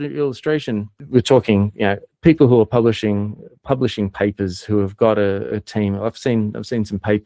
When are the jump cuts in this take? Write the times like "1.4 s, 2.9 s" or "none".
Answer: 0.9 s